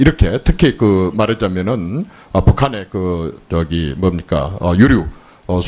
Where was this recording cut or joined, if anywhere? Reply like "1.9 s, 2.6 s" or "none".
2.4 s